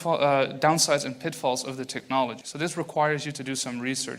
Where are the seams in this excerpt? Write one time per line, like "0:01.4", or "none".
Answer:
0:02.4

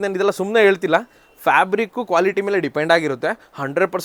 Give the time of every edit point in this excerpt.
none

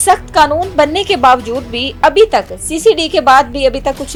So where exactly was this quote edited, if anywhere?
none

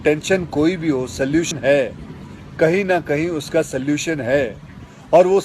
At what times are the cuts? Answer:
0:01.5

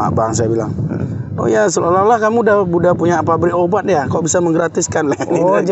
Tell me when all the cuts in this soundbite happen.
none

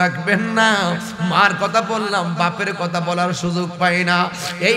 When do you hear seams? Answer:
none

